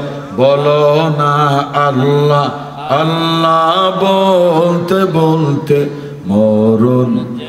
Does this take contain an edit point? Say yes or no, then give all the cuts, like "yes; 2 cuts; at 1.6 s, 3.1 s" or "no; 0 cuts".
no; 0 cuts